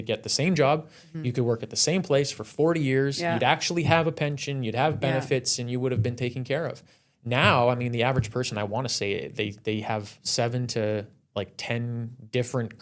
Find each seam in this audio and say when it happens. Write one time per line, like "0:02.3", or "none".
none